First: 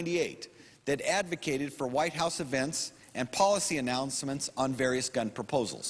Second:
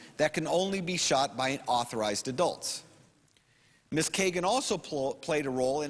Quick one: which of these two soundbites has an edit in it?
first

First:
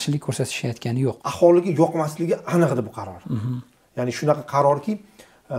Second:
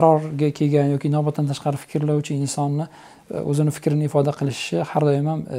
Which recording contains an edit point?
first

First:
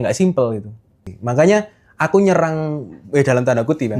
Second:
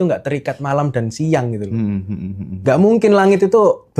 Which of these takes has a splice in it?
first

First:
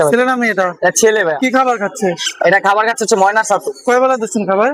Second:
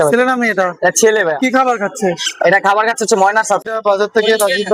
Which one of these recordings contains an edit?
second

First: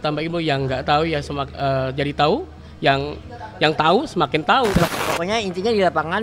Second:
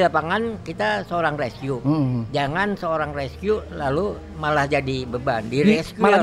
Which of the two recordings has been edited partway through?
first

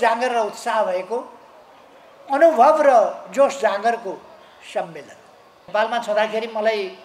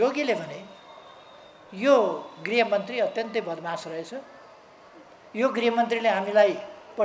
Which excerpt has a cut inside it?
first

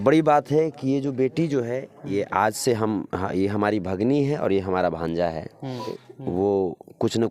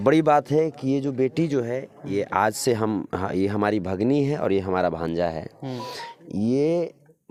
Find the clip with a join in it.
first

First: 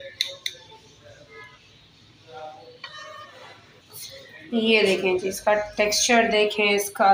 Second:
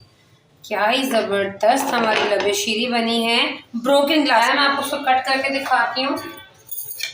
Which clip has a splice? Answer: second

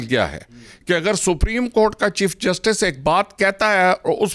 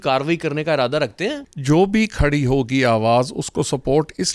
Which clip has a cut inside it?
second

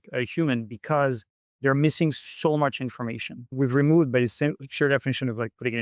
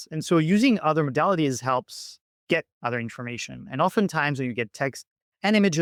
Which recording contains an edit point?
first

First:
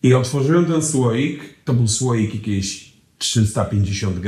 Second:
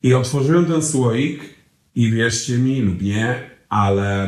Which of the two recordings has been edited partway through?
first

